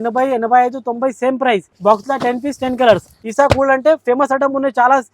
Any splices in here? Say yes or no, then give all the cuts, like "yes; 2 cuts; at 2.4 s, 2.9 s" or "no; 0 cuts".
yes; 2 cuts; at 1.7 s, 3.2 s